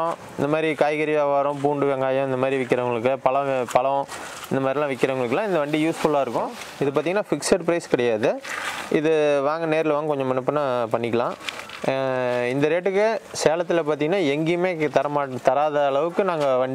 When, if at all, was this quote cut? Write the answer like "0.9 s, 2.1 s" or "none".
6.6 s